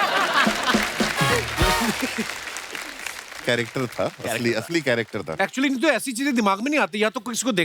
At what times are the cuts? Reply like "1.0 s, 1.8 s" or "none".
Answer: none